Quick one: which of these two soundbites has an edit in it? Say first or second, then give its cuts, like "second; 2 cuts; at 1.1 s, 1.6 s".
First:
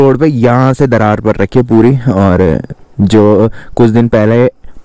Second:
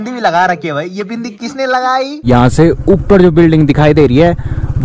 second; 1 cut; at 2.2 s